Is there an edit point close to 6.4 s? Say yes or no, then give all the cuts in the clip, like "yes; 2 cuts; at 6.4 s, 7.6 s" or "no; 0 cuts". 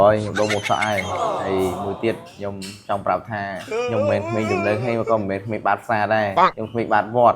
yes; 2 cuts; at 4.3 s, 6.4 s